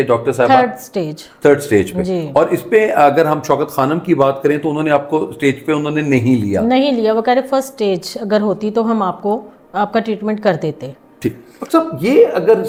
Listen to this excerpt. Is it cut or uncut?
uncut